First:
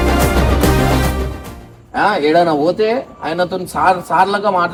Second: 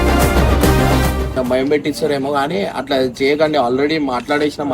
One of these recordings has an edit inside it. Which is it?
second; 1 cut; at 1.3 s

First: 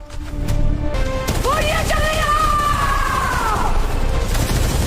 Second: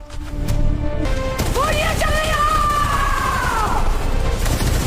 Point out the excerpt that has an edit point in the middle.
first; 1 cut; at 0.9 s

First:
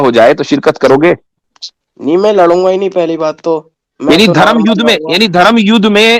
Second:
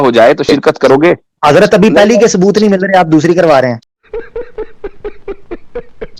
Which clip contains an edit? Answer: first; 1 cut; at 1.3 s

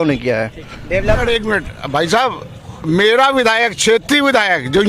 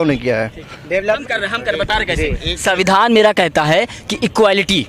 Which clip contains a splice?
first; 1 cut; at 1.2 s

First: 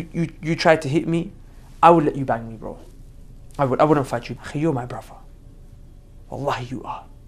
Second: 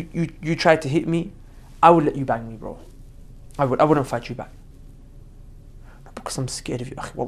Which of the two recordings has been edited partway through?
first; 1 cut; at 4.4 s

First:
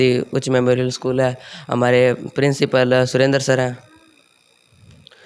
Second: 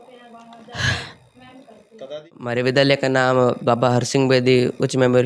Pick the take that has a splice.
second; 1 cut; at 2.4 s

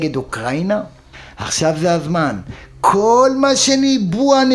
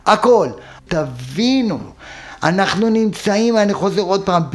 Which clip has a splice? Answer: first; 1 cut; at 1.0 s

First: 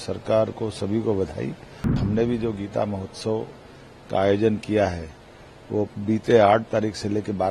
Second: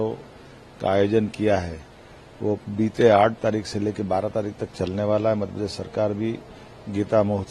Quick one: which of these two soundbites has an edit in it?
first; 1 cut; at 1.9 s

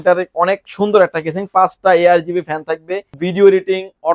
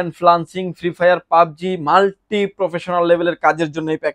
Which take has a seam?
first; 1 cut; at 3.2 s

